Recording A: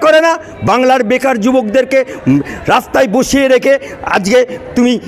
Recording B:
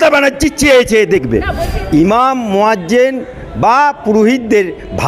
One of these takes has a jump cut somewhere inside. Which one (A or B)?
B